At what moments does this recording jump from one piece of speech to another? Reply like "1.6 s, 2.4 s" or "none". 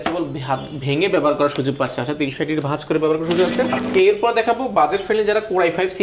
3.8 s